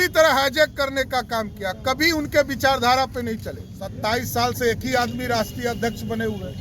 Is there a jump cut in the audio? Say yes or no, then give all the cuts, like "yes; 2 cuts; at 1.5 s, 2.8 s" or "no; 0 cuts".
yes; 1 cut; at 3.9 s